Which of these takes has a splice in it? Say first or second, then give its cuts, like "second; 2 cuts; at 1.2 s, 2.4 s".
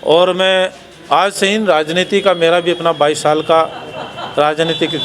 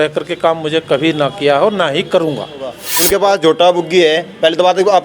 second; 1 cut; at 2.9 s